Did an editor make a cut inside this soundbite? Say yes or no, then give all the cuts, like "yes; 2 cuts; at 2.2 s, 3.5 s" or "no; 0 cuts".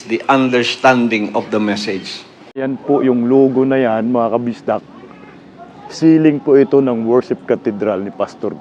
yes; 1 cut; at 2.5 s